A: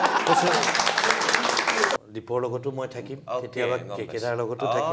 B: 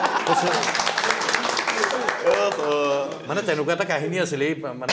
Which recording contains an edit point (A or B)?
A